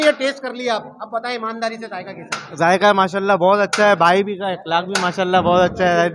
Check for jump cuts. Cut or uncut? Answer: uncut